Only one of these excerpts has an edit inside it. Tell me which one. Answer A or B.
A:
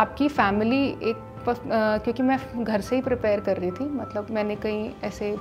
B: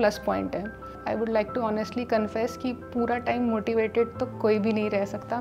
B